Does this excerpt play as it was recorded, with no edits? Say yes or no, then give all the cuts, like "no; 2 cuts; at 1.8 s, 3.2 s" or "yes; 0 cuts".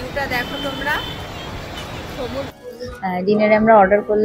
no; 1 cut; at 2.5 s